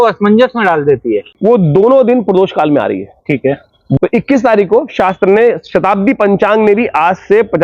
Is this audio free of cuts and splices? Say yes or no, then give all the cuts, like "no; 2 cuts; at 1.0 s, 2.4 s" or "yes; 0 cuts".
no; 2 cuts; at 1.3 s, 4.0 s